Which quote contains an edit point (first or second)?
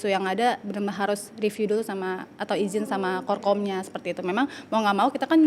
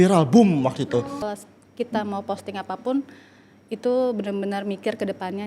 second